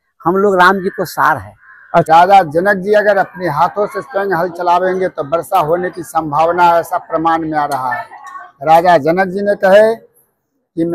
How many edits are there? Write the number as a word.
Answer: one